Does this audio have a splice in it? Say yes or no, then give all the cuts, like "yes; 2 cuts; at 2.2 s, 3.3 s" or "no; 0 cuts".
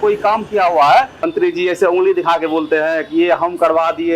yes; 1 cut; at 1.2 s